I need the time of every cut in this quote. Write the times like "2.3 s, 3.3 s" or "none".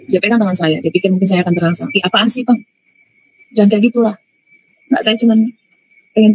none